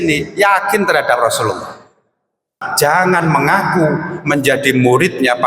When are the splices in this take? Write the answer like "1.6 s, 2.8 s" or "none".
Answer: 2.7 s